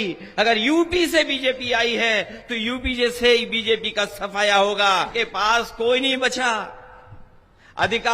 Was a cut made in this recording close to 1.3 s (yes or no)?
no